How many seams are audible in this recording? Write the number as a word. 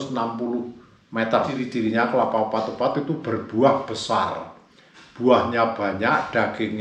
one